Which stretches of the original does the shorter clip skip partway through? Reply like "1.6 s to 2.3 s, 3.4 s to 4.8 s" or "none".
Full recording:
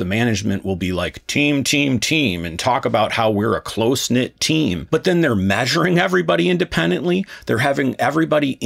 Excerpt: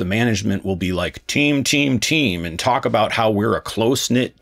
none